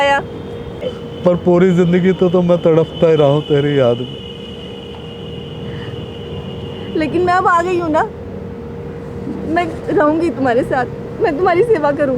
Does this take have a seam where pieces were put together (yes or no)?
yes